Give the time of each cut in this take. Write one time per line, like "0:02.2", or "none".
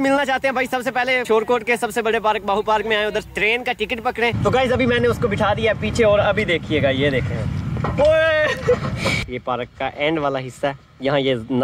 0:01.2
0:03.3
0:04.3
0:09.3